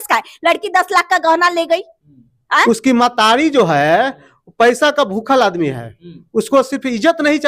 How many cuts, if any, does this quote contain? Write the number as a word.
one